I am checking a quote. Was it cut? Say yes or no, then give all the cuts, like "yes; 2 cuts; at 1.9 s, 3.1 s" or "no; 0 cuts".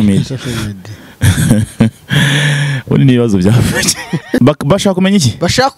yes; 1 cut; at 4.4 s